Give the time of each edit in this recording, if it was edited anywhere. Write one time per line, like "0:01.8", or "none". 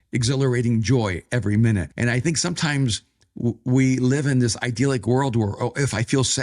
0:01.9